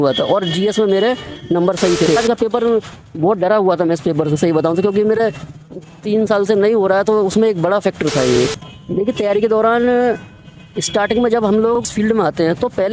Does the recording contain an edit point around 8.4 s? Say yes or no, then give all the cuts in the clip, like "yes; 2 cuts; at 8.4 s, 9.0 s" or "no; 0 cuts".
yes; 3 cuts; at 2.1 s, 8.4 s, 11.8 s